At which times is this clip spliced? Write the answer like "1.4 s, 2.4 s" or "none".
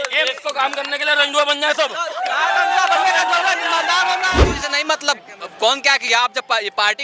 4.6 s